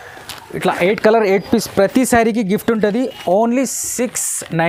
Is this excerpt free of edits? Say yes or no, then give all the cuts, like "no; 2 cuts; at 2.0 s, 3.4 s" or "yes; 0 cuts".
yes; 0 cuts